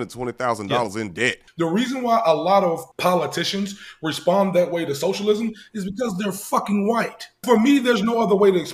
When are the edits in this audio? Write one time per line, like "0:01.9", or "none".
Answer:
0:01.4
0:02.9
0:07.3